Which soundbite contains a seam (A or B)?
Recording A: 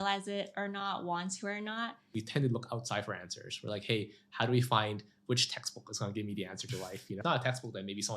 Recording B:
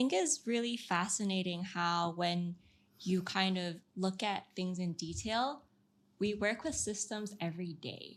A